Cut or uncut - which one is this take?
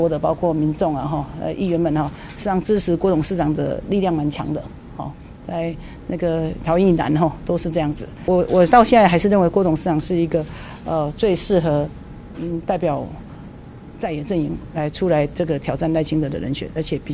cut